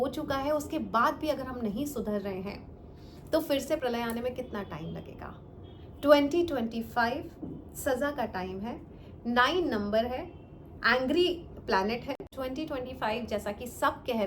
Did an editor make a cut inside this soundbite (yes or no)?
yes